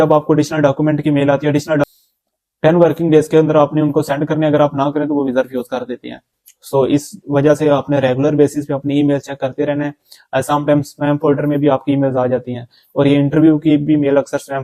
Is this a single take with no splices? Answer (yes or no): no